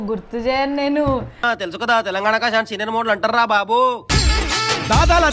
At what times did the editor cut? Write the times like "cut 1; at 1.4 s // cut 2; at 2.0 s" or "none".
cut 1; at 1.3 s

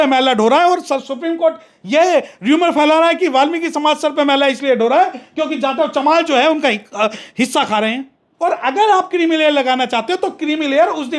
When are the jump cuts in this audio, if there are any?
cut 1; at 8.3 s

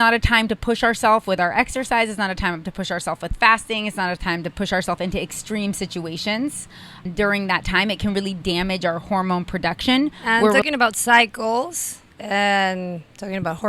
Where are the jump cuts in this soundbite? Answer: cut 1; at 7.0 s // cut 2; at 10.5 s

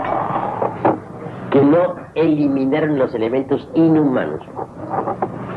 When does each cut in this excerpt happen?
cut 1; at 2.0 s

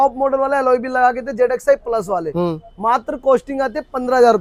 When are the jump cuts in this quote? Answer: none

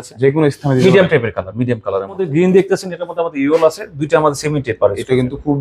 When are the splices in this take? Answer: cut 1; at 2.2 s

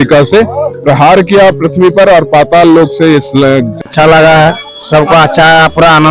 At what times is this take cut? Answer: cut 1; at 3.8 s

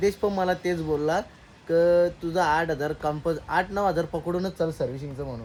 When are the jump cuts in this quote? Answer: none

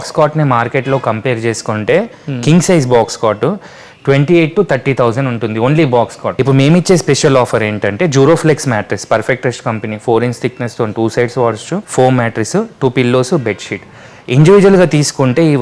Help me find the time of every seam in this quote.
cut 1; at 6.3 s // cut 2; at 11.8 s

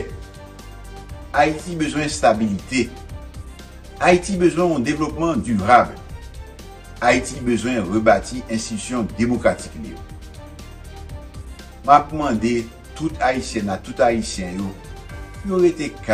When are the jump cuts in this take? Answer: none

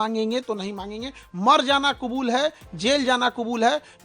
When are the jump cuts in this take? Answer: none

